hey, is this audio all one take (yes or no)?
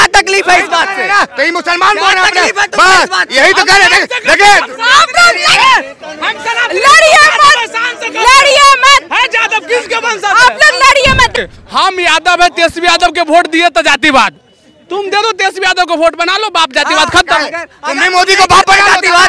no